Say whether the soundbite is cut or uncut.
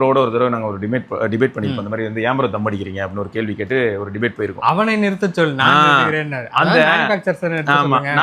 uncut